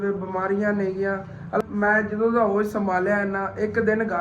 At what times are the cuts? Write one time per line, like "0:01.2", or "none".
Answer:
0:01.6